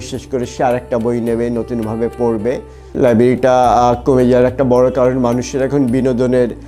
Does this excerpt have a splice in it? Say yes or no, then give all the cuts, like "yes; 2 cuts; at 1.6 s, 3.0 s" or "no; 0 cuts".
yes; 1 cut; at 2.9 s